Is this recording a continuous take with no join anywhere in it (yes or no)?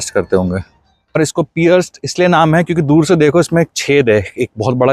no